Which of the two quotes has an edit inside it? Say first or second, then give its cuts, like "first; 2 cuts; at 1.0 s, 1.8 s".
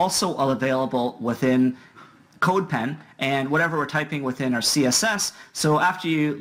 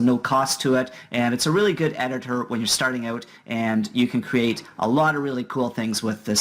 second; 1 cut; at 5.2 s